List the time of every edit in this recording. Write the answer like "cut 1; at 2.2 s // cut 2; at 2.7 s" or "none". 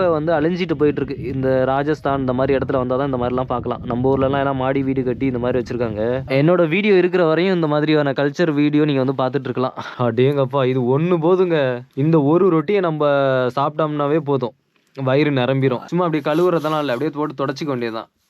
cut 1; at 6.2 s // cut 2; at 9.8 s // cut 3; at 15.8 s